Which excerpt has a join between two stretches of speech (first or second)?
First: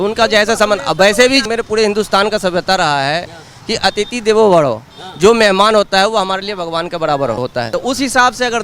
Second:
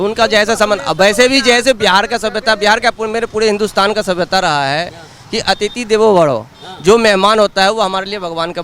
first